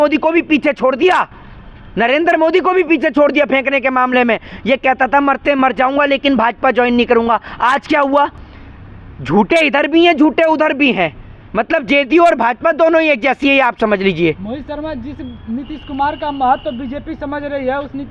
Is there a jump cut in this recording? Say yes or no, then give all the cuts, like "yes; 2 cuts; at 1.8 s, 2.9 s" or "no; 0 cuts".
no; 0 cuts